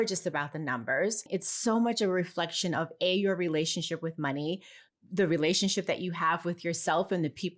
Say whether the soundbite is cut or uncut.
cut